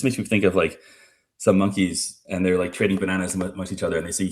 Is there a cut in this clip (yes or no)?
no